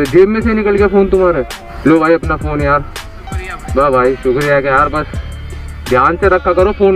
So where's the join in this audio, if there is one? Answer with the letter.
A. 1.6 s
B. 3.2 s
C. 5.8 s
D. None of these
A